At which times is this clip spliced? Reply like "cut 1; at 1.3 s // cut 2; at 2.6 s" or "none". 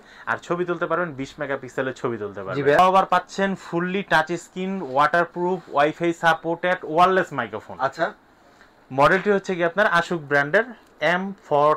cut 1; at 2.8 s